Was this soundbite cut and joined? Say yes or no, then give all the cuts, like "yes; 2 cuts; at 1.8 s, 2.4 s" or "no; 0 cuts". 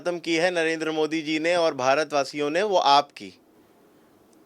no; 0 cuts